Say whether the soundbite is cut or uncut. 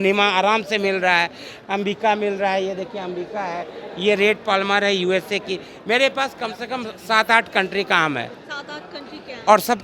uncut